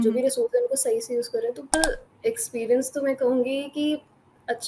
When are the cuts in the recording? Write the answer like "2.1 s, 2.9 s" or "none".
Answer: 1.7 s